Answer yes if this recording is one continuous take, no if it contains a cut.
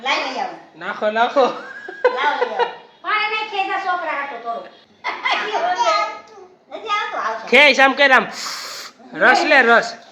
no